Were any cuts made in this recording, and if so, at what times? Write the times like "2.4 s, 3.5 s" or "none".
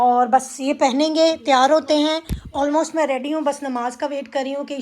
none